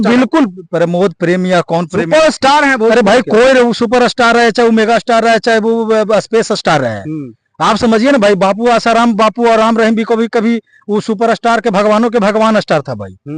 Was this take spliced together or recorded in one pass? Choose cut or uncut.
uncut